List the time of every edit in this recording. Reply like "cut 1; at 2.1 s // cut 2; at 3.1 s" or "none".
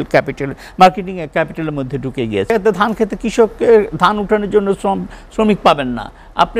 cut 1; at 2.5 s